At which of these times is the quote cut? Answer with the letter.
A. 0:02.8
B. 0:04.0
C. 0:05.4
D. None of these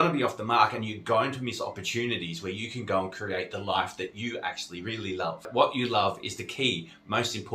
C